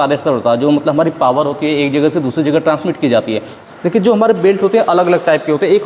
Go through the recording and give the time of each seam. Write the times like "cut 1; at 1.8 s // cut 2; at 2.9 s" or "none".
cut 1; at 3.5 s